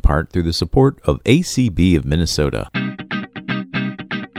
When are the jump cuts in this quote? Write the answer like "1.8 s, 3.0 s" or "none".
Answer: 2.7 s